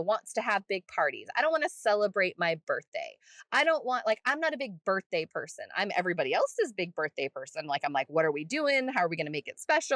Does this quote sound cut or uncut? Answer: uncut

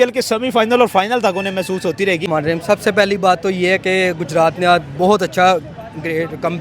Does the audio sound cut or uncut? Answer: cut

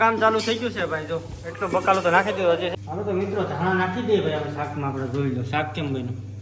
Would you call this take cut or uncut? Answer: cut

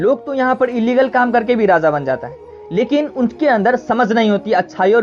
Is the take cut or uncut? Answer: uncut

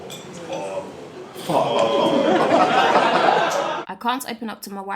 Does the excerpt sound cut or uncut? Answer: cut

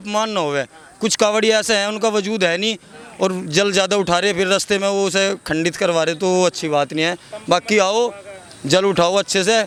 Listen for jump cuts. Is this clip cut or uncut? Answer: uncut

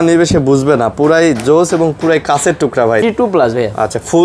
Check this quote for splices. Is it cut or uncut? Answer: cut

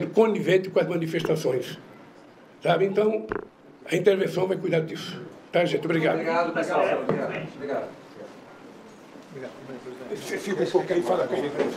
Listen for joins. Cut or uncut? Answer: uncut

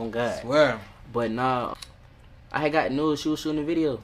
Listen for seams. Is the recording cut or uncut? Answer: cut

